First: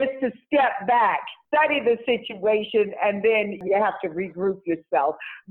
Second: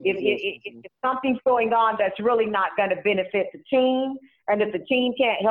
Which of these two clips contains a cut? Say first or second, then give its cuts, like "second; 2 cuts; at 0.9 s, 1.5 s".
first; 2 cuts; at 1.3 s, 3.6 s